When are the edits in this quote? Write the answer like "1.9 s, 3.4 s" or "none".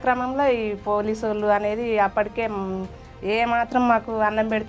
none